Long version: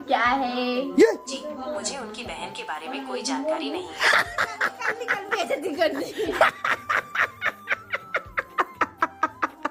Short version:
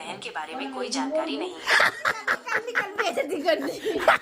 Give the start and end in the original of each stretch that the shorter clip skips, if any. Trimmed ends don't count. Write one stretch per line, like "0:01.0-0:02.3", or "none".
none